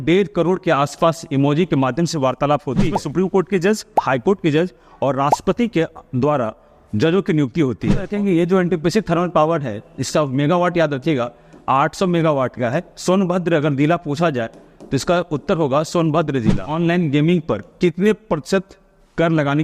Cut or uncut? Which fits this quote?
cut